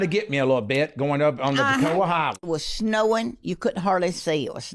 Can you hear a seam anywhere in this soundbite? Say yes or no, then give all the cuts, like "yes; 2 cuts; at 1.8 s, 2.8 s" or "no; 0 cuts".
yes; 1 cut; at 2.4 s